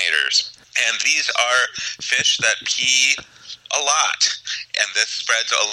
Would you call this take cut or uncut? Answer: uncut